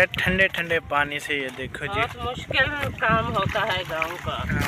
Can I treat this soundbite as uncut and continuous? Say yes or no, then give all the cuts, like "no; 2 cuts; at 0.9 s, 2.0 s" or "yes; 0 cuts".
yes; 0 cuts